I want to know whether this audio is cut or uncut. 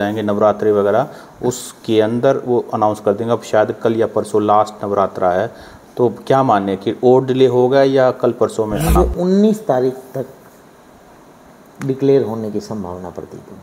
uncut